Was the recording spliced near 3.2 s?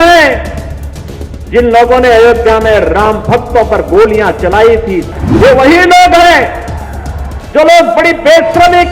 no; 1 cut; at 5.0 s

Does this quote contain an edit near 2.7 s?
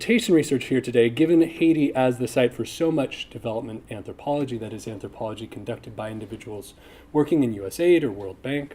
yes; 1 cut; at 2.7 s

